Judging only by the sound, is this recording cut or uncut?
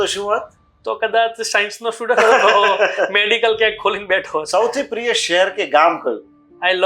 cut